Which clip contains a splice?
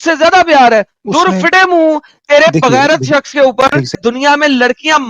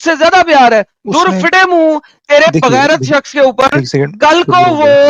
first; 1 cut; at 4.0 s

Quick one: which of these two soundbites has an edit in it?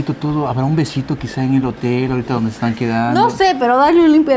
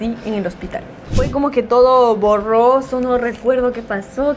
second; 1 cut; at 1.2 s

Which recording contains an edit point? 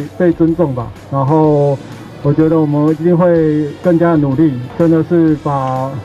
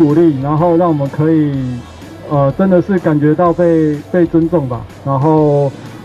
first; 1 cut; at 4.6 s

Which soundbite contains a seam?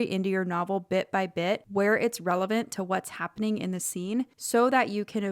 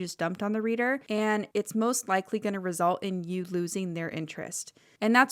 second; 1 cut; at 1.3 s

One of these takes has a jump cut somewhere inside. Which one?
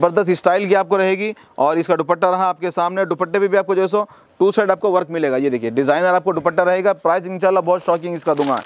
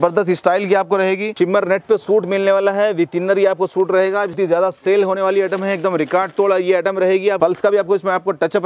second; 3 cuts; at 1.3 s, 4.3 s, 7.4 s

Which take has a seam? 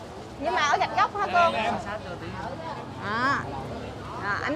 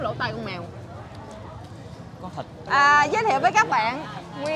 second; 1 cut; at 2.7 s

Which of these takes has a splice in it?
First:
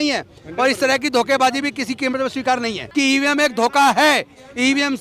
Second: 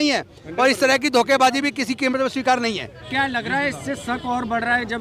first; 1 cut; at 2.8 s

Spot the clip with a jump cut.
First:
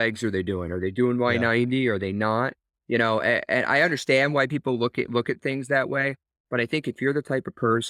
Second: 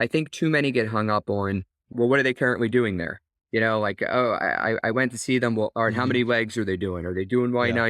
second; 1 cut; at 1.9 s

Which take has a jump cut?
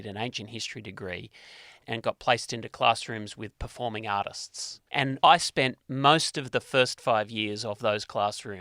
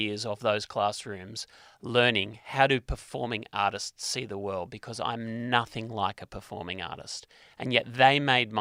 first; 2 cuts; at 1.8 s, 5.0 s

